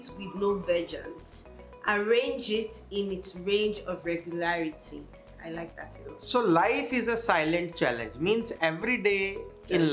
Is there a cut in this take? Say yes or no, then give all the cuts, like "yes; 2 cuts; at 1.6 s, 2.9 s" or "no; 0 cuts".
no; 0 cuts